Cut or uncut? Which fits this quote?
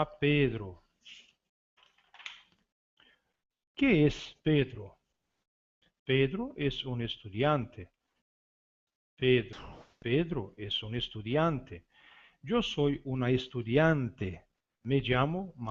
uncut